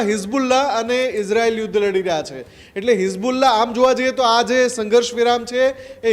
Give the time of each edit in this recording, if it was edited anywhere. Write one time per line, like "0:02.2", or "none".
none